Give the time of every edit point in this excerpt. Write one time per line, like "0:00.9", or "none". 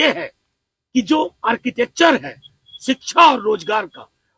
none